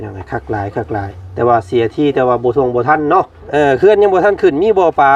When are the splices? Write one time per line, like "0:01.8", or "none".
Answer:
0:03.4